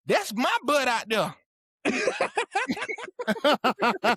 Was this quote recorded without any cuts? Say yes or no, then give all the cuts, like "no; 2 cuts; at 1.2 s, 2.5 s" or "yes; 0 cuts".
yes; 0 cuts